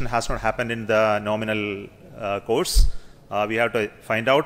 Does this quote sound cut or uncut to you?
uncut